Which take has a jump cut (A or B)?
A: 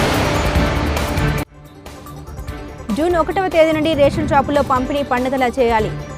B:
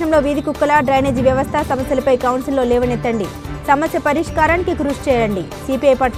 A